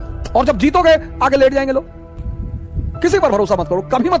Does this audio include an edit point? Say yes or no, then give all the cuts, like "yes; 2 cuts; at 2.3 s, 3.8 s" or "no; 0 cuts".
yes; 1 cut; at 2.0 s